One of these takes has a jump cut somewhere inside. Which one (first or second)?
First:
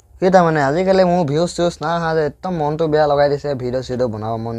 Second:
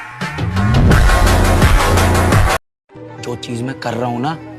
second